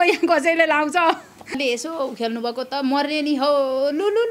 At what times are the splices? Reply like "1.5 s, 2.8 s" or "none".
1.6 s